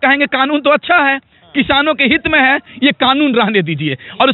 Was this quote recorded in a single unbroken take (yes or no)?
no